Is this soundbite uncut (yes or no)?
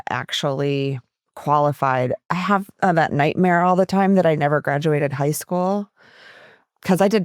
no